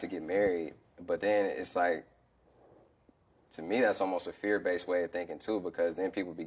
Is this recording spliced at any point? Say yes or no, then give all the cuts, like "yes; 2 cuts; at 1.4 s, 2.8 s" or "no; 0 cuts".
no; 0 cuts